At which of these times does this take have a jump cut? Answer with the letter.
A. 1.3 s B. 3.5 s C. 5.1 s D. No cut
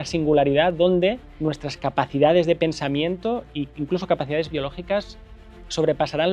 A